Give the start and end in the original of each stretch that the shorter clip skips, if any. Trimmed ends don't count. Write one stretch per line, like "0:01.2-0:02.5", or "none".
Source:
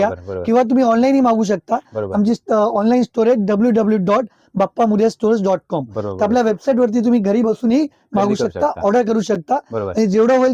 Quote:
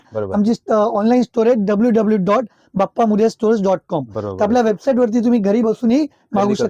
none